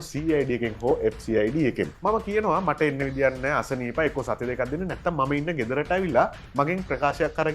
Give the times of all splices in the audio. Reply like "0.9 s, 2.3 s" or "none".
1.9 s